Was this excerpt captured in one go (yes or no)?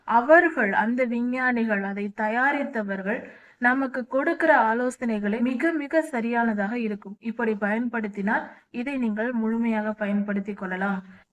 no